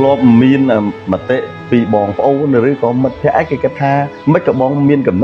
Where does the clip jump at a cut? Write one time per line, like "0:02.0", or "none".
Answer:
0:01.0
0:04.1